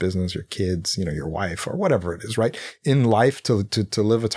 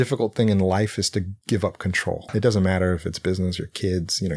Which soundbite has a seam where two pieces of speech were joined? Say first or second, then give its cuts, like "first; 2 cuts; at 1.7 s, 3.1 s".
second; 2 cuts; at 1.4 s, 2.3 s